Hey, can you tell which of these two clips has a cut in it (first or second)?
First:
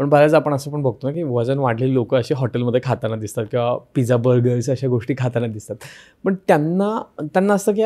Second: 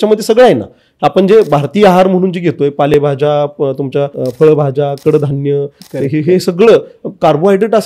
second